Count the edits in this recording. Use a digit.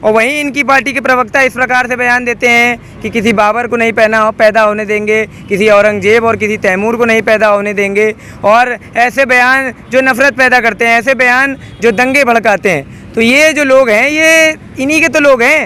0